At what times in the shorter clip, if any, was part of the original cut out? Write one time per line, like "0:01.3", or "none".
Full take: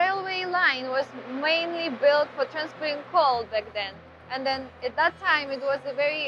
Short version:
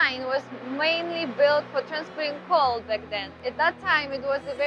0:03.3